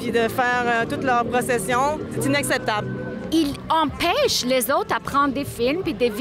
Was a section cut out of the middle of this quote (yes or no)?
yes